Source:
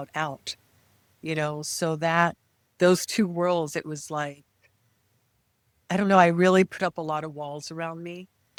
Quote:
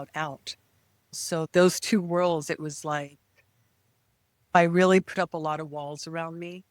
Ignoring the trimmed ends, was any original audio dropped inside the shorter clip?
yes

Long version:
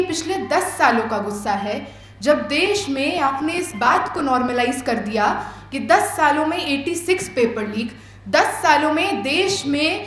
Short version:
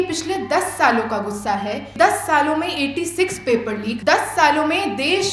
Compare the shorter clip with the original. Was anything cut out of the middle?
yes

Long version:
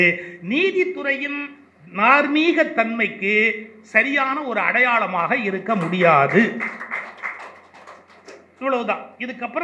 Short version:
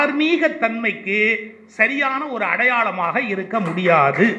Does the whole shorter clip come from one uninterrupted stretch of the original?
yes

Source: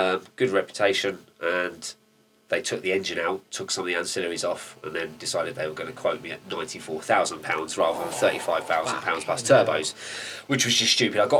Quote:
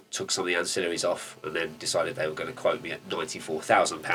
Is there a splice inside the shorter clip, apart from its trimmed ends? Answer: no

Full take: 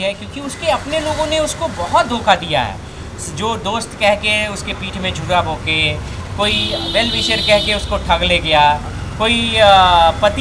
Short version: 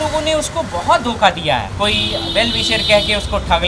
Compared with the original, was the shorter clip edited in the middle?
yes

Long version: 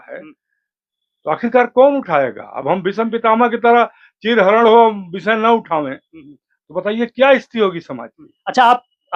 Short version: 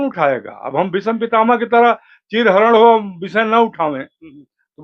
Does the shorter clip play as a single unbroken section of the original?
yes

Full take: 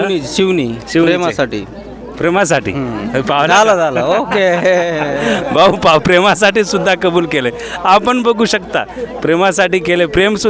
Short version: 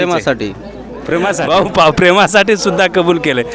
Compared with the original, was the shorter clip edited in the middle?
yes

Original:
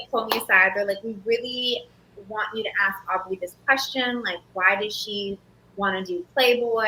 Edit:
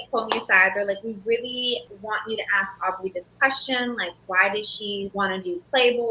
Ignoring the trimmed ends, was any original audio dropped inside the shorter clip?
yes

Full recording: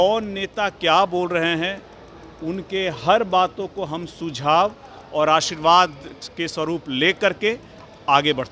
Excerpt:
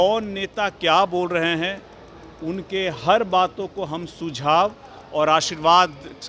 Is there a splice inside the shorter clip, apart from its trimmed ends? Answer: no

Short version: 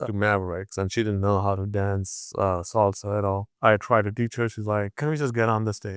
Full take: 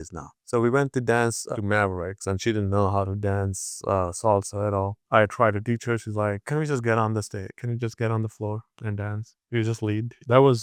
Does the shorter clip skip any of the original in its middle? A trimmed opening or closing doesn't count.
no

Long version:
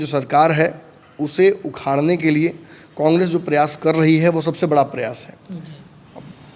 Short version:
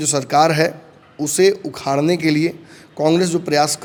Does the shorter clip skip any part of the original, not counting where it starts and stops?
no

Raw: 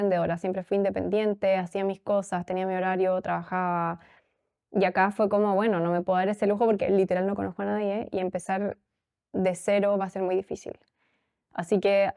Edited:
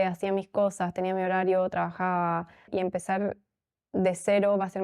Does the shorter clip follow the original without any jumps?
no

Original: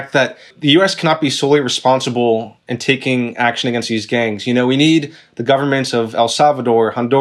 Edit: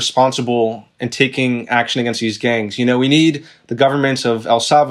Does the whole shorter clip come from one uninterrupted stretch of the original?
yes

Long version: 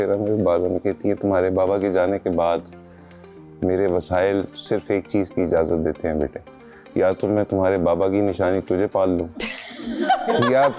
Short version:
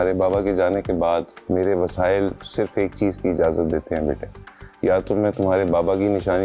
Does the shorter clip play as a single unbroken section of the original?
no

